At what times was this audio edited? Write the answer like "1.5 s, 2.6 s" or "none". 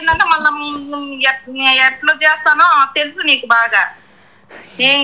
none